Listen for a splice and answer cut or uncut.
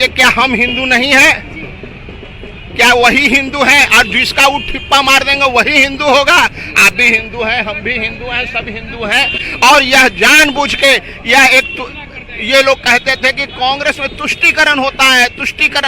uncut